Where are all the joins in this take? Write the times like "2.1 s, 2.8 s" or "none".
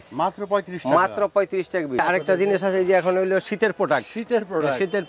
2.0 s